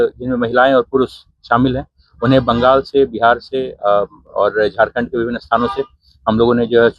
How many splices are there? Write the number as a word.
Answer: zero